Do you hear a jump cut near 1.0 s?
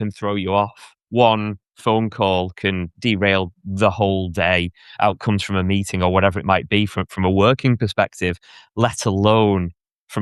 yes; 2 cuts; at 1.0 s, 2.9 s

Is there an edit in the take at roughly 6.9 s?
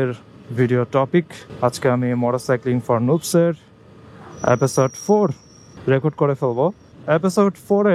yes; 1 cut; at 6.9 s

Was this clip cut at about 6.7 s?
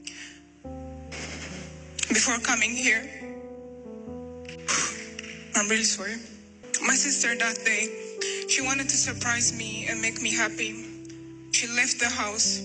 yes; 1 cut; at 6.7 s

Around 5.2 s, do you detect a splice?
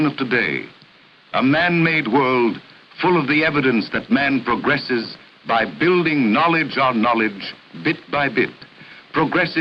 no; 0 cuts

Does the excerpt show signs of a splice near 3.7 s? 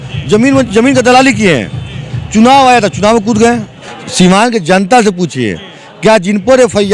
yes; 1 cut; at 3.7 s

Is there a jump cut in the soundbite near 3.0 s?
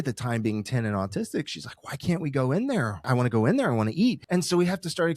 yes; 2 cuts; at 3.0 s, 4.2 s

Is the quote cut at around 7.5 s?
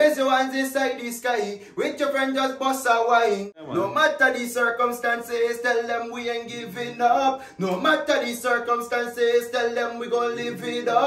no; 1 cut; at 3.6 s

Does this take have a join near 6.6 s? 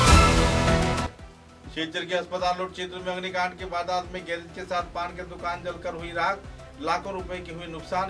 no; 1 cut; at 1.1 s

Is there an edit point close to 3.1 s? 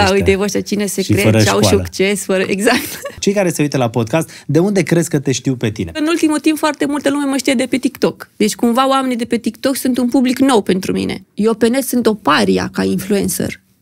yes; 3 cuts; at 3.1 s, 6.0 s, 11.2 s

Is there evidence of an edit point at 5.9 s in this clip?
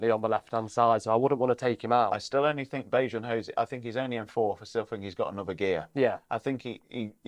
no; 0 cuts

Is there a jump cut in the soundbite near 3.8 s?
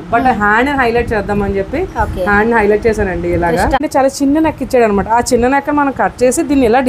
yes; 1 cut; at 3.8 s

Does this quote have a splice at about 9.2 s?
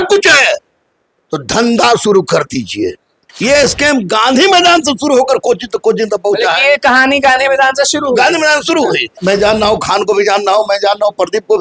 yes; 2 cuts; at 3.3 s, 9.2 s

